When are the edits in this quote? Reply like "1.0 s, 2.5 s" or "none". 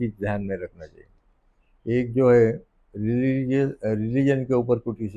none

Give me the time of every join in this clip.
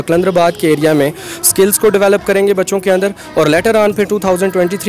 none

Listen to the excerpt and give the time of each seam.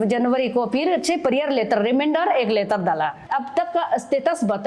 3.2 s

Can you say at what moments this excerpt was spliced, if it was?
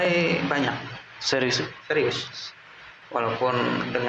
2.9 s

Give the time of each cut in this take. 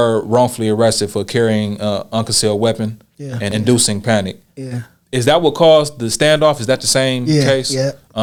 none

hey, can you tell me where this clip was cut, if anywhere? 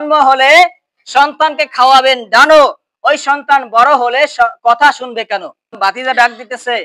5.8 s

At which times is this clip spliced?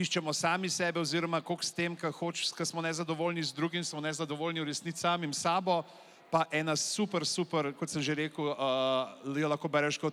none

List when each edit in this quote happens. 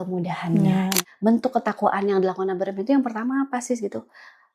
0.9 s

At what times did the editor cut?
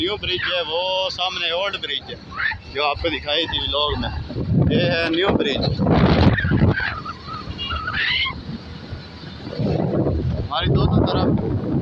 none

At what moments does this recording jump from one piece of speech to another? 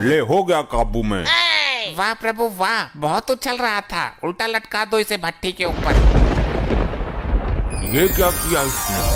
none

